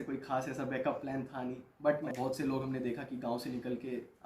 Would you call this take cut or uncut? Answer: cut